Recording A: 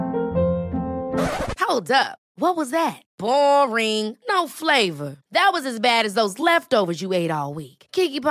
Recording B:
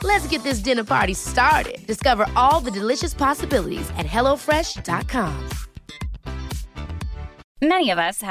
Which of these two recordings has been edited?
B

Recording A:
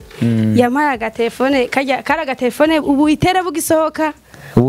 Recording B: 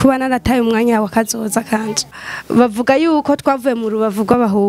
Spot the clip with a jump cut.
B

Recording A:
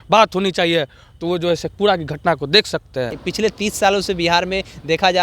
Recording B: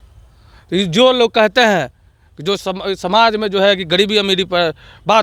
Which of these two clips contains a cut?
A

